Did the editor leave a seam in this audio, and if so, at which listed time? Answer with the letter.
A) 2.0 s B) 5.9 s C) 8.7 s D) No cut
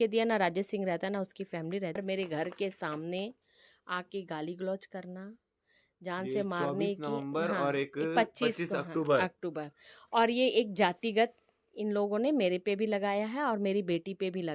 A